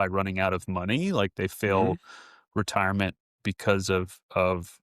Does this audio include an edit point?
no; 0 cuts

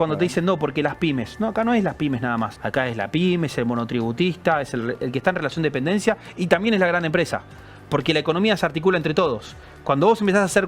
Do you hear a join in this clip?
yes; 1 cut; at 2.6 s

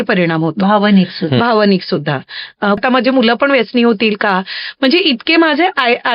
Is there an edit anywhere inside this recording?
yes; 1 cut; at 2.8 s

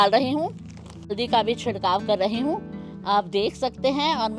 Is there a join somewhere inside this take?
yes; 1 cut; at 1.1 s

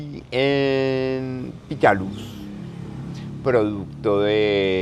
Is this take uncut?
yes; 0 cuts

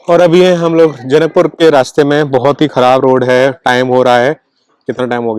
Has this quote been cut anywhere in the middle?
no; 0 cuts

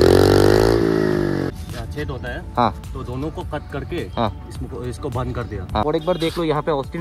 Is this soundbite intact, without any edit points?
no; 2 cuts; at 1.5 s, 5.8 s

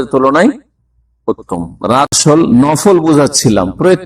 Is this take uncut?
no; 1 cut; at 2.1 s

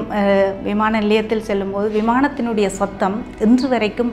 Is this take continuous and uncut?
yes; 0 cuts

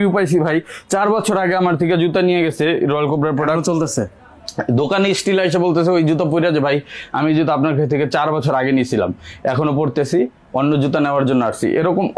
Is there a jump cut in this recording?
no; 0 cuts

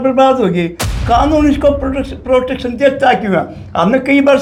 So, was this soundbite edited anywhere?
no; 0 cuts

